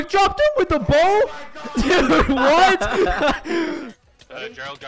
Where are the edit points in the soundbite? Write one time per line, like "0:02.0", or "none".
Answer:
0:03.9